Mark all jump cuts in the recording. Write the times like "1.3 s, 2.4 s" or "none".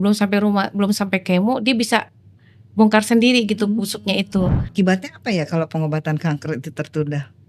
4.6 s